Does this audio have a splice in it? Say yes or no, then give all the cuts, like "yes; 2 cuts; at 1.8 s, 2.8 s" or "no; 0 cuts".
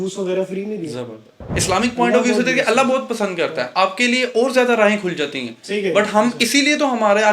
yes; 1 cut; at 1.5 s